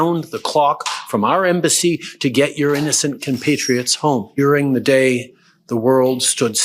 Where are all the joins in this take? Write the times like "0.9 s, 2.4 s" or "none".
4.3 s